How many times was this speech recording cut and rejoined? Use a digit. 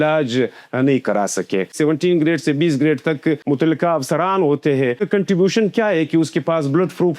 3